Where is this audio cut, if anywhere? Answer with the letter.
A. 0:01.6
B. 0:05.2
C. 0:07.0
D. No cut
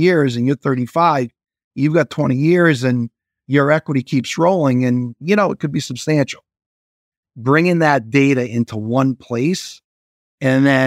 C